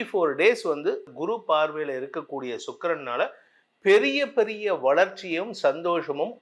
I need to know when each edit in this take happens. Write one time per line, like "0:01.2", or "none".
0:01.1